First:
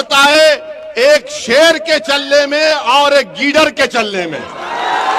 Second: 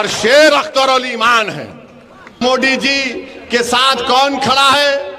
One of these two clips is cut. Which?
second; 1 cut; at 2.4 s

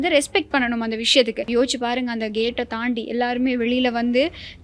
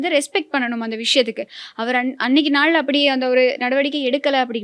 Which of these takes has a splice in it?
first; 1 cut; at 1.4 s

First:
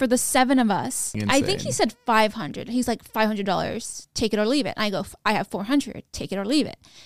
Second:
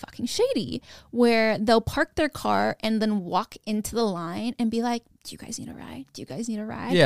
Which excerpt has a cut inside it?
first; 1 cut; at 1.2 s

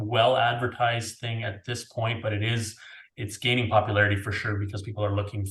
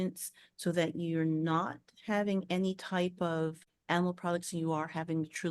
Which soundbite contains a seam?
second; 1 cut; at 3.7 s

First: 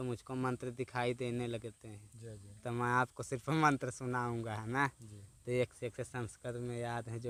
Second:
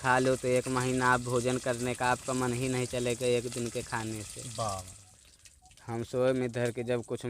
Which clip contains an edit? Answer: second; 1 cut; at 5.0 s

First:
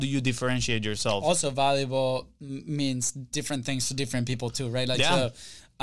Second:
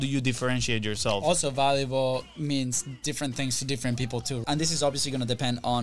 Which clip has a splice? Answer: second; 2 cuts; at 2.3 s, 4.4 s

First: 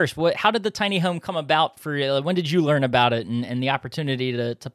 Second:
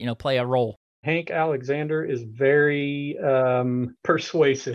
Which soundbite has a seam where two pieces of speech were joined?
second; 2 cuts; at 1.0 s, 3.9 s

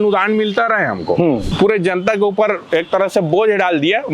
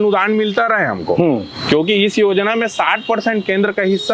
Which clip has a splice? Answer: first; 1 cut; at 1.5 s

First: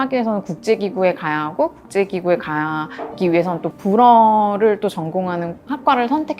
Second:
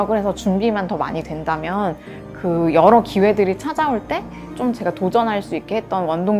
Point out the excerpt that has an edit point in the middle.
first; 1 cut; at 3.7 s

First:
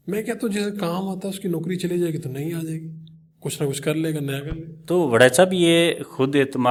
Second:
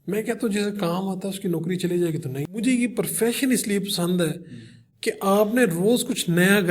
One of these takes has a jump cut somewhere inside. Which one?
second; 1 cut; at 2.6 s

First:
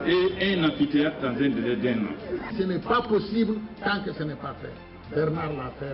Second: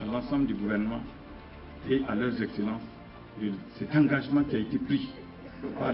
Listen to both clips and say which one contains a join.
first; 1 cut; at 2.5 s

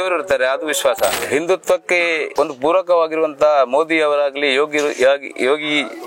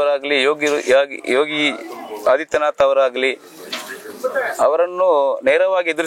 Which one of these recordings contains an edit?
first; 2 cuts; at 1.1 s, 2.3 s

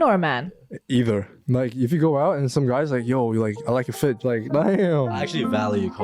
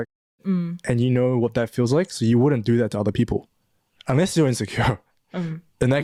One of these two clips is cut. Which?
first; 2 cuts; at 1.4 s, 4.2 s

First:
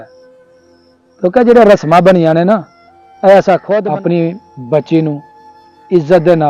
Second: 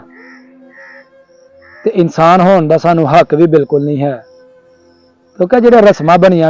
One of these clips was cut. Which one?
first; 1 cut; at 3.8 s

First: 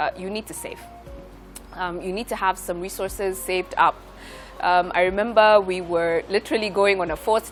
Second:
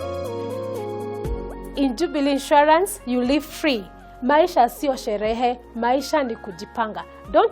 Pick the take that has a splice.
second; 1 cut; at 1.6 s

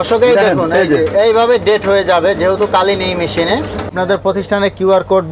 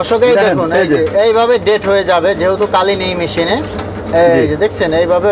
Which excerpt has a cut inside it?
first; 1 cut; at 3.9 s

